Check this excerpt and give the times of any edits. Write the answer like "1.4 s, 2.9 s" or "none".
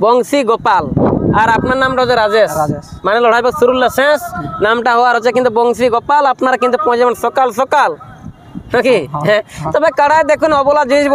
none